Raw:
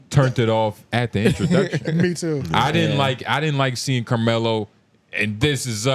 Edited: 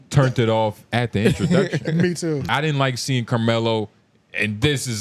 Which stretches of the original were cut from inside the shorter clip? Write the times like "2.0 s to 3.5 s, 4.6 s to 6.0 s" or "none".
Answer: 2.4 s to 3.2 s

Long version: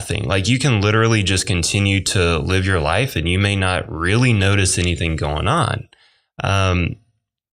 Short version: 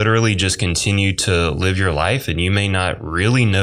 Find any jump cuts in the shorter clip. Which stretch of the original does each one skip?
none

